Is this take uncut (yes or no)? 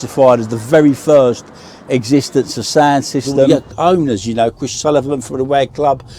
no